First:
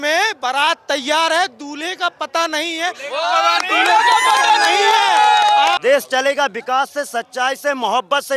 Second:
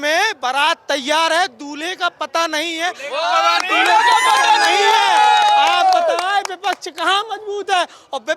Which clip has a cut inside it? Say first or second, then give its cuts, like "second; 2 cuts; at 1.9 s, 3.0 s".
first; 1 cut; at 5.8 s